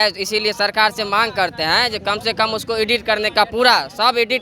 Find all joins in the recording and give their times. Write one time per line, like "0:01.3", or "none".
none